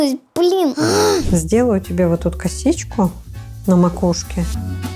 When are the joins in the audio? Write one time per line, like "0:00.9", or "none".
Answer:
0:01.2